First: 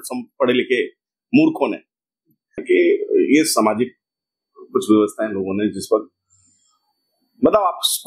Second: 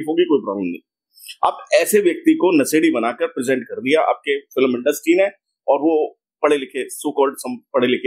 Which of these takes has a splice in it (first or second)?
first